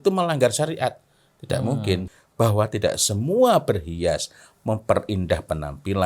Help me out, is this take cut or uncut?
cut